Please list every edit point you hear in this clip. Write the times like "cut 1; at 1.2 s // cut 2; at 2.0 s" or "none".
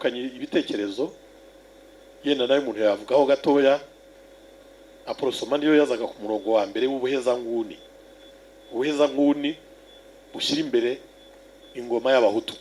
none